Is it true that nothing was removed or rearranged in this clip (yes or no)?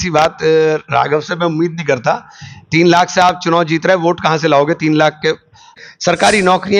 no